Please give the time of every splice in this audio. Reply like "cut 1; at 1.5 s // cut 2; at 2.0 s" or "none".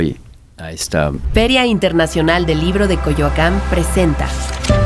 cut 1; at 1.2 s

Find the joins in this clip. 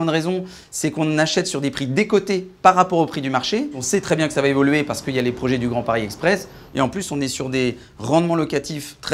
none

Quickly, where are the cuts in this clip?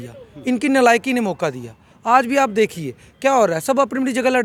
none

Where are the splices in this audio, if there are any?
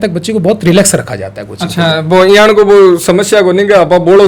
none

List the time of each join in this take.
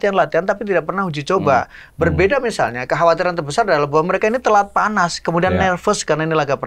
none

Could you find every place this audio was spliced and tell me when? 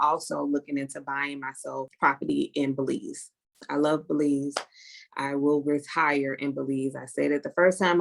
cut 1; at 1.9 s

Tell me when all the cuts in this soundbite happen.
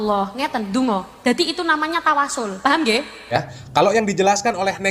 cut 1; at 3.5 s

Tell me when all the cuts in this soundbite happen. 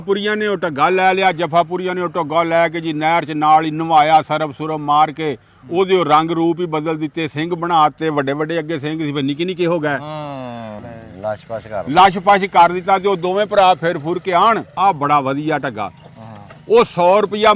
cut 1; at 10.7 s // cut 2; at 14.7 s

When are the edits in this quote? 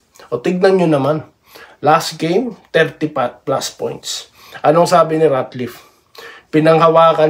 none

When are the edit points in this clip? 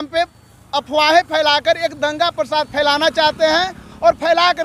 none

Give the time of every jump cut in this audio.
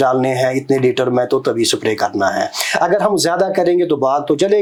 none

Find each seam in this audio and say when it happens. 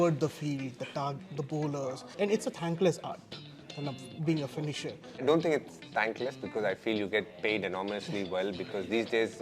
cut 1; at 2.1 s // cut 2; at 5.2 s

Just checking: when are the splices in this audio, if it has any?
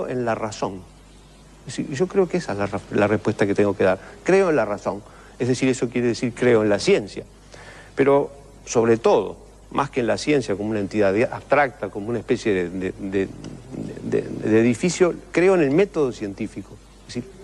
cut 1; at 9.2 s

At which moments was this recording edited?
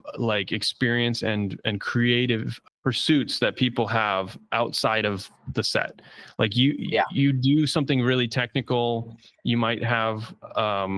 cut 1; at 2.5 s

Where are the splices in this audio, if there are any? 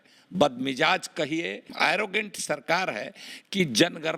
cut 1; at 1.7 s

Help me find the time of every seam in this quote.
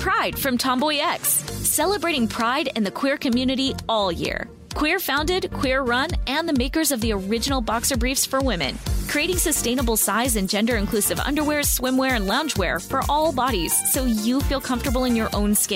none

